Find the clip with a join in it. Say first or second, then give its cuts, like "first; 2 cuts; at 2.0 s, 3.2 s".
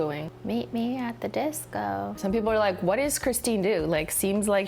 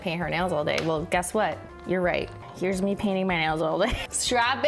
first; 1 cut; at 2.2 s